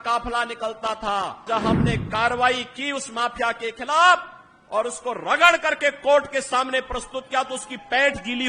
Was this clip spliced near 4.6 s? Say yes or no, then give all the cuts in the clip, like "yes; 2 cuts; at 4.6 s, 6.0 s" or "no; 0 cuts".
no; 1 cut; at 1.4 s